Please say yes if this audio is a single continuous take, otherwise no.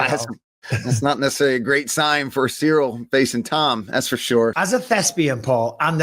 no